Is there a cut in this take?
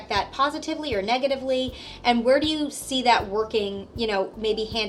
no; 0 cuts

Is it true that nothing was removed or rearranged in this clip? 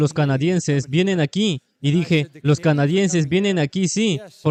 yes; 0 cuts

